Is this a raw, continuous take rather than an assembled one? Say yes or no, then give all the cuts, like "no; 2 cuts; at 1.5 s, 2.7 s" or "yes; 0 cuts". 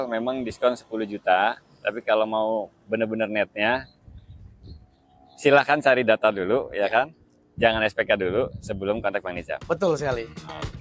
yes; 0 cuts